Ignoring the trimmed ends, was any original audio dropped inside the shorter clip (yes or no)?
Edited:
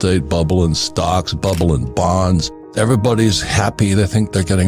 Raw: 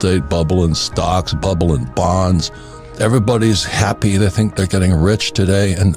yes